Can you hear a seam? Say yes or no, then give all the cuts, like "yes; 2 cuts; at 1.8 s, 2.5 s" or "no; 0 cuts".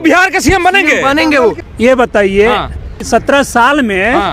yes; 2 cuts; at 1.6 s, 3.0 s